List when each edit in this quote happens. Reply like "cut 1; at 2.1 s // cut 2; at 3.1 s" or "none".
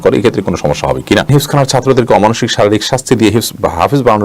cut 1; at 1.3 s